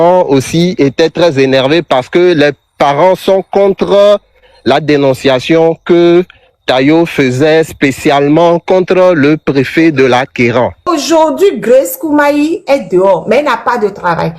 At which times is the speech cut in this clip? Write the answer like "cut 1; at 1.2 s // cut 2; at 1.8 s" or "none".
cut 1; at 10.8 s

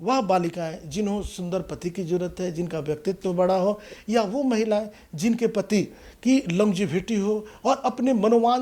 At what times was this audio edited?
none

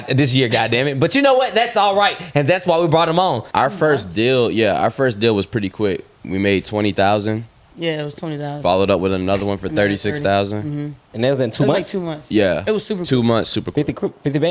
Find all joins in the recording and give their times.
cut 1; at 3.4 s

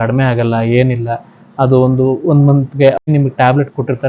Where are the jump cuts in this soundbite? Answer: cut 1; at 3.0 s

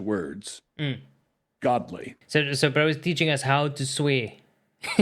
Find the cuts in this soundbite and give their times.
cut 1; at 2.1 s

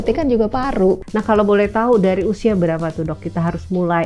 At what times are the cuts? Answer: cut 1; at 1.1 s

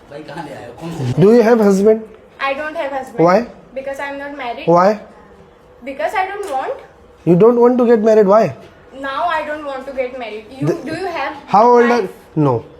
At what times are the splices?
cut 1; at 1.0 s

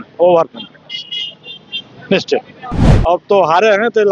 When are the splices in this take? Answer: cut 1; at 2.9 s

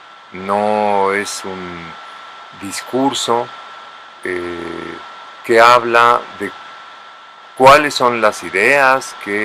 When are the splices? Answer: cut 1; at 4.1 s

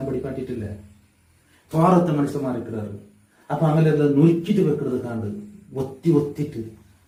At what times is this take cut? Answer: none

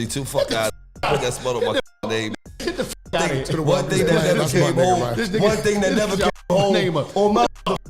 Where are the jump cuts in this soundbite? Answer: none

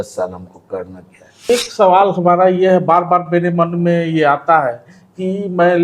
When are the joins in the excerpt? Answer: cut 1; at 1.5 s

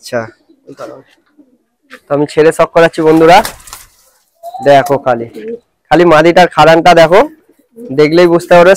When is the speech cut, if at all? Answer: none

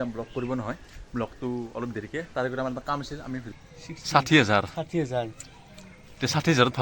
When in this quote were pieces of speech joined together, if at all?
cut 1; at 3.5 s

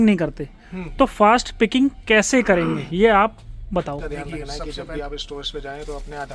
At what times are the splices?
cut 1; at 4.5 s

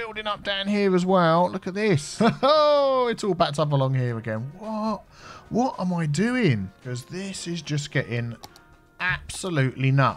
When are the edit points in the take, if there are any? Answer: cut 1; at 2.1 s // cut 2; at 6.8 s

